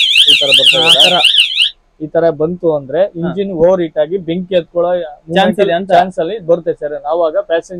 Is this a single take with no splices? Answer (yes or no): yes